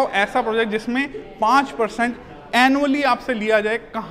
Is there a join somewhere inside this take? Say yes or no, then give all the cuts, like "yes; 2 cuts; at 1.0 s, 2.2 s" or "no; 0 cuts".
no; 0 cuts